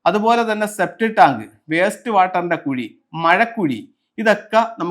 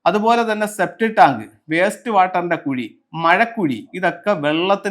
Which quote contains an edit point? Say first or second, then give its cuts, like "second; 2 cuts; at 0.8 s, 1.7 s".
second; 1 cut; at 3.9 s